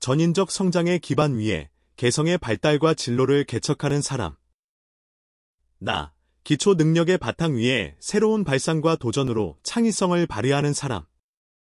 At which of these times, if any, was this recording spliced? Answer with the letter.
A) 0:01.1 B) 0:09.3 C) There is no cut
B